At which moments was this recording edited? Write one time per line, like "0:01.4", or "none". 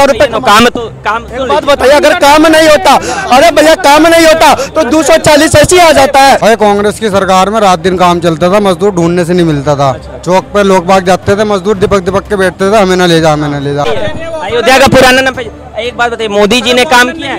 0:06.4
0:14.1